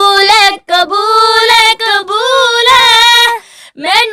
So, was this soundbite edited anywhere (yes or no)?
no